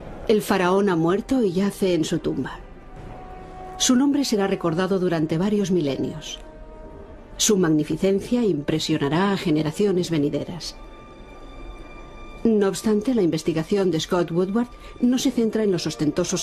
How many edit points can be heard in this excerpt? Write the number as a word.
one